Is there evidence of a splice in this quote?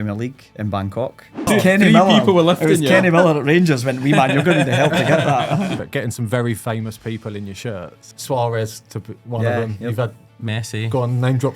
yes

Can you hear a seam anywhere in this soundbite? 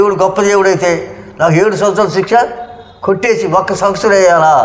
no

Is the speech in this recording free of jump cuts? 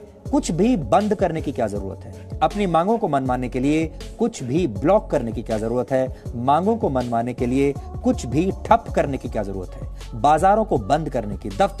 yes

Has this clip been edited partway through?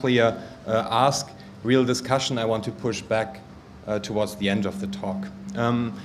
no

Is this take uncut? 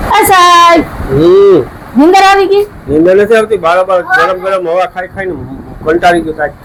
yes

